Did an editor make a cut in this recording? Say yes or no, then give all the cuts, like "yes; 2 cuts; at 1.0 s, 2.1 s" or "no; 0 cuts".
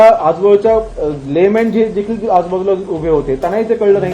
no; 0 cuts